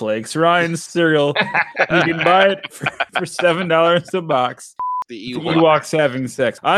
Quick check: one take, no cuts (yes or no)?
no